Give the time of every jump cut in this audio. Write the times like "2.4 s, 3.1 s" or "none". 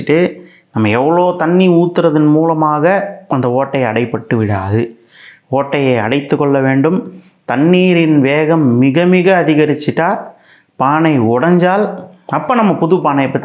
none

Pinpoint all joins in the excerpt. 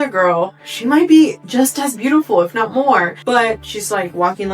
3.1 s

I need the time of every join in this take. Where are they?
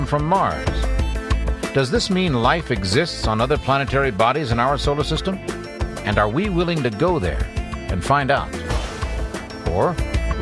1.3 s

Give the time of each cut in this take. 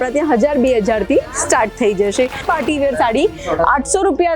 2.4 s

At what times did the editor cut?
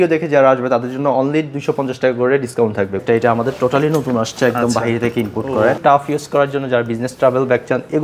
3.0 s, 5.8 s

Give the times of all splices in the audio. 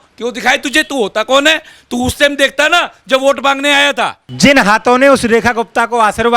4.2 s

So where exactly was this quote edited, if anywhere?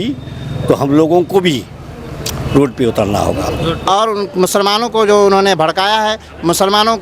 3.7 s

